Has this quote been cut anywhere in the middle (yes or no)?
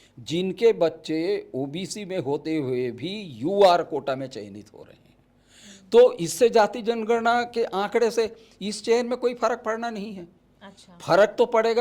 no